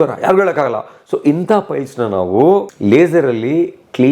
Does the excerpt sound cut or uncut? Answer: cut